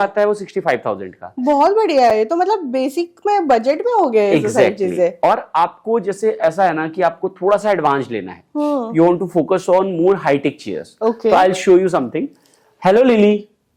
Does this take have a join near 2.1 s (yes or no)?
no